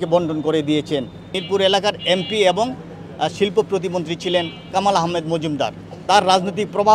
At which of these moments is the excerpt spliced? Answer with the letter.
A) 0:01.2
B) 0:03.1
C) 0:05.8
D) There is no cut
A